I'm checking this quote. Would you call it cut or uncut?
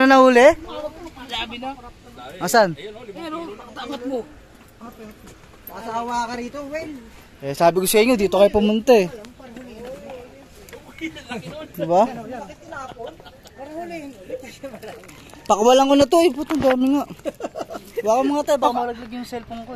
uncut